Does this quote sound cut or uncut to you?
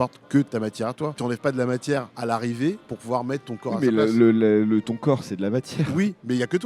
cut